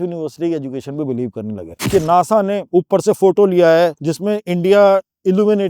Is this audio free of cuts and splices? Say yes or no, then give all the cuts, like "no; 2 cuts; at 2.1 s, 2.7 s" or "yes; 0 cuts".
no; 3 cuts; at 1.7 s, 2.6 s, 4.1 s